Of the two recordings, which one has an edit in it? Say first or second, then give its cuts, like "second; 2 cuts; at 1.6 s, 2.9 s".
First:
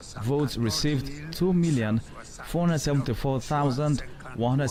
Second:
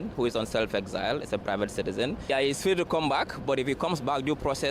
second; 1 cut; at 2.3 s